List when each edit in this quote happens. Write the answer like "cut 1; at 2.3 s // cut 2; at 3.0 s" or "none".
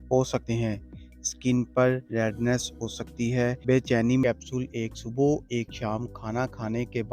cut 1; at 4.2 s